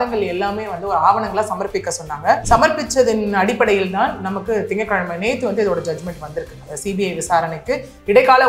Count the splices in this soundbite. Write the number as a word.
one